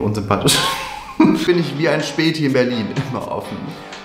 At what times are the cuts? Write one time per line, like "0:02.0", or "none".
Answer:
0:01.4